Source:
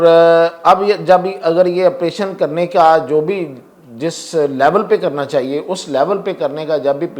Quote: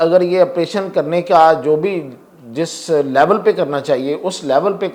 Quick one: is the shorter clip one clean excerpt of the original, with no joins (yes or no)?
yes